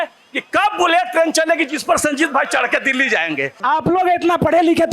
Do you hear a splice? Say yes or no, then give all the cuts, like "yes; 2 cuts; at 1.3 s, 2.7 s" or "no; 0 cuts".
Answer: yes; 1 cut; at 3.5 s